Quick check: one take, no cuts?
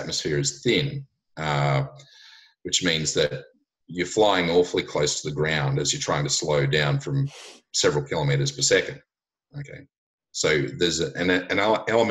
yes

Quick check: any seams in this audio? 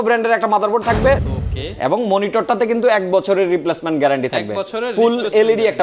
yes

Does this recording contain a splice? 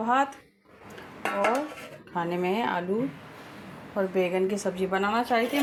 no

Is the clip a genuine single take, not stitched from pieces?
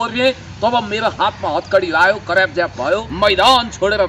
no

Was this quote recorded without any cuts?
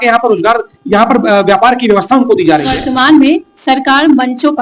no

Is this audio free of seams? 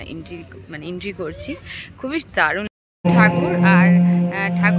no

